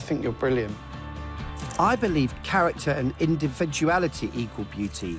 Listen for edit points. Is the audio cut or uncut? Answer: uncut